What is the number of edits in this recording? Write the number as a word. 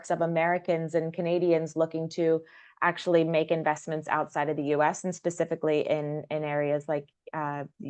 zero